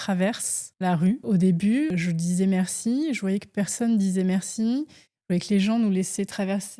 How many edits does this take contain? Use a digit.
2